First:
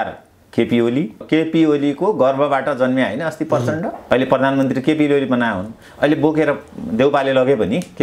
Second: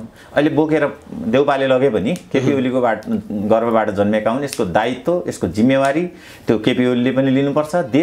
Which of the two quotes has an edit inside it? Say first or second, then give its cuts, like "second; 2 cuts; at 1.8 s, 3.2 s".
first; 2 cuts; at 1.2 s, 4.0 s